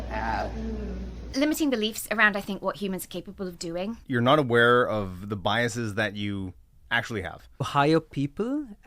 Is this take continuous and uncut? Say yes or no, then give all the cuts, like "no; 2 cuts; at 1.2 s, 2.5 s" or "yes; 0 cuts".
no; 3 cuts; at 1.1 s, 4.0 s, 7.7 s